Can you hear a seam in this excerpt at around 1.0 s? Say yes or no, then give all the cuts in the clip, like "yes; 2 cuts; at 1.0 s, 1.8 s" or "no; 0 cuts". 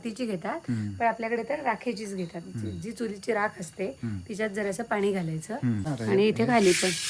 no; 1 cut; at 5.9 s